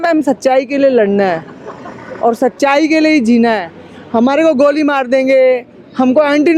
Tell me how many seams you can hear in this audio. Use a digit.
0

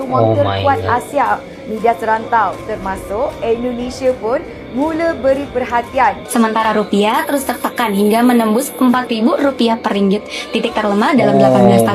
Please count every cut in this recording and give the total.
1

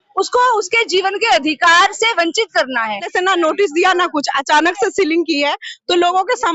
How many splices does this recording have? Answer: 1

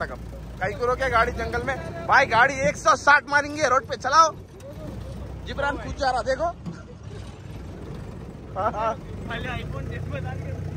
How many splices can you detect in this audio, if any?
0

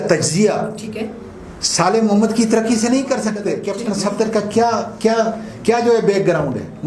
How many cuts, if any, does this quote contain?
1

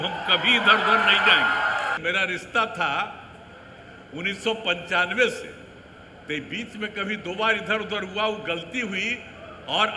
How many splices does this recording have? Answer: 1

